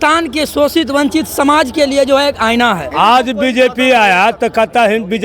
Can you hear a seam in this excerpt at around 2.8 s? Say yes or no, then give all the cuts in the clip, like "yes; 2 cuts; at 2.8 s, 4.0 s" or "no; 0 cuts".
yes; 1 cut; at 2.8 s